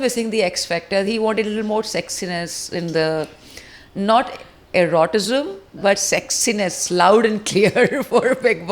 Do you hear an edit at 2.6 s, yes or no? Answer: no